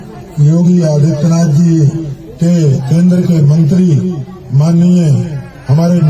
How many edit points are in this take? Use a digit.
1